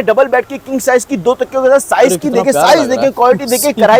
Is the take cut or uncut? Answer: uncut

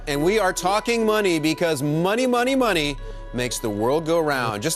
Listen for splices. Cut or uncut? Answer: uncut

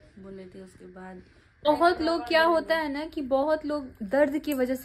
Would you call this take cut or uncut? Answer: cut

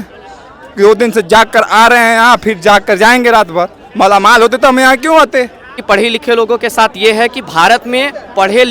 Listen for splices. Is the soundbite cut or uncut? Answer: cut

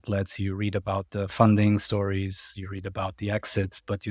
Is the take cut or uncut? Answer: uncut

